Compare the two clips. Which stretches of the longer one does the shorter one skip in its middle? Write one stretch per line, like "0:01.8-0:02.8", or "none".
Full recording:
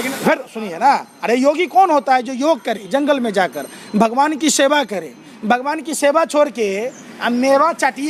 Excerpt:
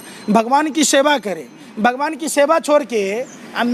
none